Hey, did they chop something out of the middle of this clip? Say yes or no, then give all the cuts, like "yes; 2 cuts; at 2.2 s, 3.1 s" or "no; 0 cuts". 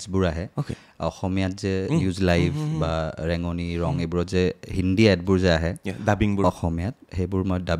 no; 0 cuts